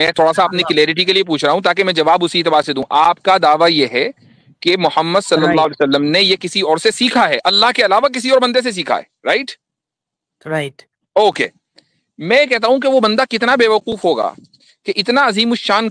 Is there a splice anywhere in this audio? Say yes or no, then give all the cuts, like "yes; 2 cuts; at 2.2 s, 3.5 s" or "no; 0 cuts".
no; 0 cuts